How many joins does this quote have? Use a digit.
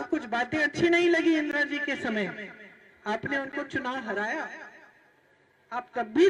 0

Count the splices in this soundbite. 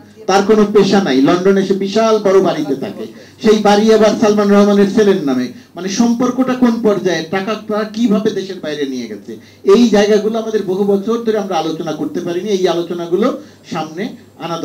0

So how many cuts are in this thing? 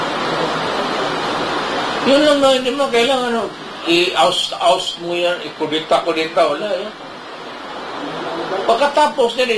1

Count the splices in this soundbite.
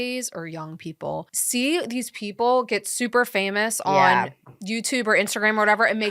1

